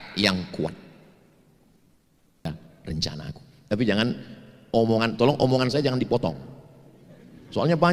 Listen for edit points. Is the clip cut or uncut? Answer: cut